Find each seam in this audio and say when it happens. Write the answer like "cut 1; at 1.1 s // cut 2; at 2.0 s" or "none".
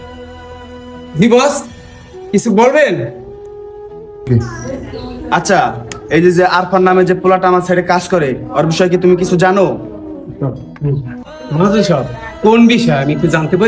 cut 1; at 1.0 s